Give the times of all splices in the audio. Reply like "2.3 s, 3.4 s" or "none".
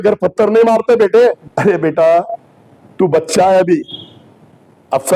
1.4 s

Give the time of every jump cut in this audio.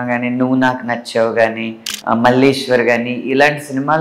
none

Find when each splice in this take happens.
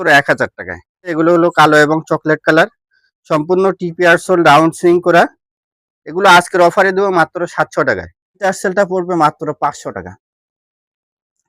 1.1 s, 8.4 s

